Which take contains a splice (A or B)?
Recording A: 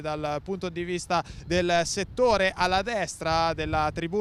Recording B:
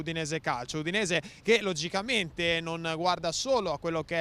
B